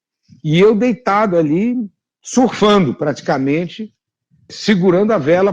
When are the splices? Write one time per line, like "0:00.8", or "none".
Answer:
0:04.5